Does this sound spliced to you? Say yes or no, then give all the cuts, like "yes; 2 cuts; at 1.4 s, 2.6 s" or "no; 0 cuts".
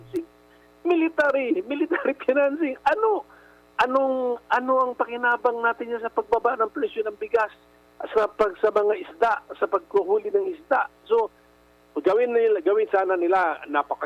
no; 0 cuts